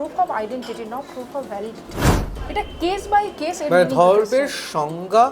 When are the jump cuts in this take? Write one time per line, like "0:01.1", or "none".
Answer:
0:02.3